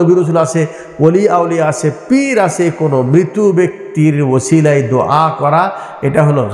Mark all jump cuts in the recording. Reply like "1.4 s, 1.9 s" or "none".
none